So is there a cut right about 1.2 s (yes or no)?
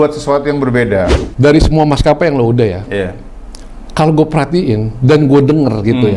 yes